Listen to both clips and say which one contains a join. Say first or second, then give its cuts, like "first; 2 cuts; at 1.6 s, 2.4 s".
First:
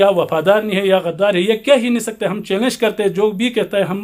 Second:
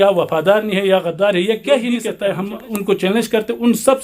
second; 1 cut; at 2.1 s